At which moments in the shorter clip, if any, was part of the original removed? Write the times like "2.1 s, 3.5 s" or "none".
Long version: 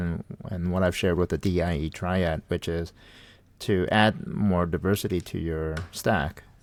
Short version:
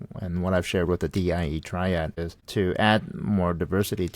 2.1 s